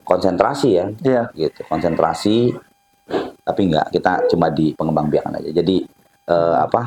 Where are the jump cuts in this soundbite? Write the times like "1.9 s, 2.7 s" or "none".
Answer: none